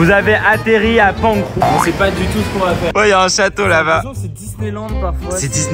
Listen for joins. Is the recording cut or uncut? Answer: cut